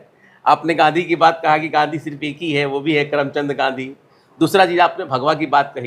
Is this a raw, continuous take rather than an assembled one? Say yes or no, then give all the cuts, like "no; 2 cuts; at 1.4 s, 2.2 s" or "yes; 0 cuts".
yes; 0 cuts